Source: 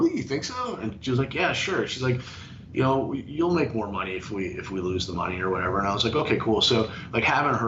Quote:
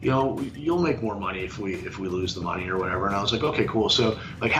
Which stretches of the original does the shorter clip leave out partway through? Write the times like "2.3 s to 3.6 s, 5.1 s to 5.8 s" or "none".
none